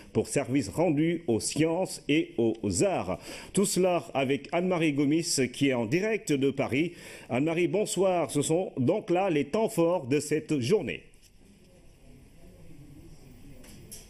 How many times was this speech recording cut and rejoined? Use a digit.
0